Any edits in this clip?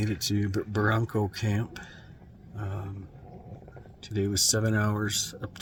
no; 0 cuts

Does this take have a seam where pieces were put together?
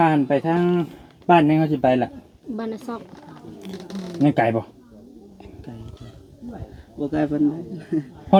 no; 0 cuts

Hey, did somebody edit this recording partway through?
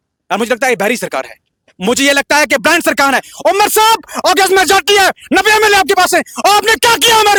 no; 0 cuts

